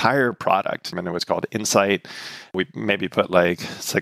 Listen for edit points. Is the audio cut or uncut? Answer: cut